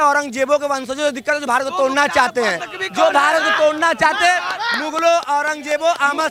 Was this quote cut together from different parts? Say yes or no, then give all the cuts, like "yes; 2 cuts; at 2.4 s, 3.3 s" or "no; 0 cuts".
no; 0 cuts